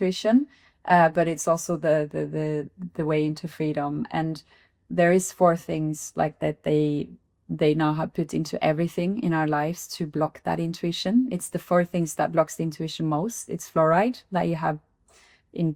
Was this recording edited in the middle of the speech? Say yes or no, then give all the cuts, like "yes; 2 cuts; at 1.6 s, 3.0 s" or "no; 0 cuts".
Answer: no; 0 cuts